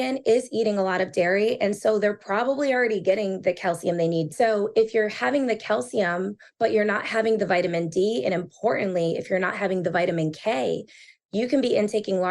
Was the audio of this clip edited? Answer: yes; 2 cuts; at 4.3 s, 11.1 s

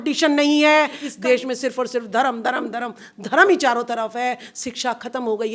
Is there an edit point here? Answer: yes; 1 cut; at 1.0 s

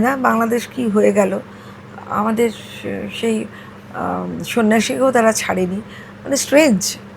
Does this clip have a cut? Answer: no; 0 cuts

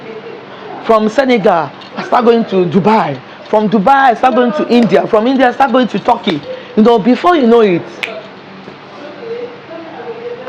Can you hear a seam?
no; 0 cuts

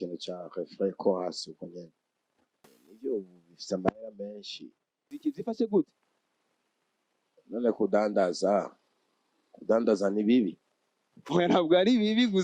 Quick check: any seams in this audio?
yes; 2 cuts; at 2.8 s, 5.1 s

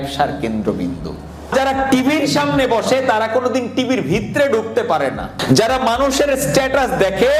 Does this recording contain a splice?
yes; 2 cuts; at 1.5 s, 5.4 s

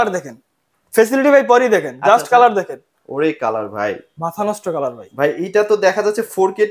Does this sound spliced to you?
no; 0 cuts

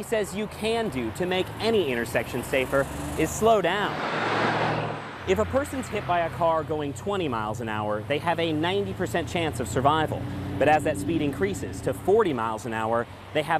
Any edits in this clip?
no; 0 cuts

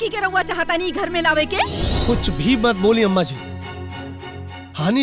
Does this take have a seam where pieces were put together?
yes; 1 cut; at 1.9 s

